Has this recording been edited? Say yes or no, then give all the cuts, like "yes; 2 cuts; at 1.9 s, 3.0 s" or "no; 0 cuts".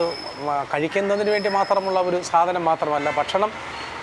no; 0 cuts